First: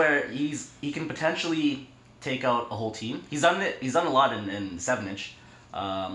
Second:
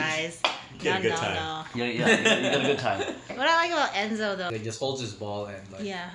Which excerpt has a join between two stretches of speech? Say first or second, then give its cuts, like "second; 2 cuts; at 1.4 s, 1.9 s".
second; 1 cut; at 4.5 s